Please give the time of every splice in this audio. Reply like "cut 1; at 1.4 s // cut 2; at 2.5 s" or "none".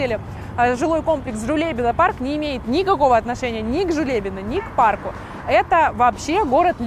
none